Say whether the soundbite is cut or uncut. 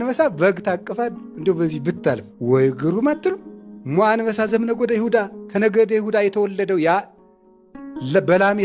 uncut